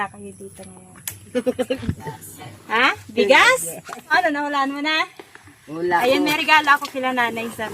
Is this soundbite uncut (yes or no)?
no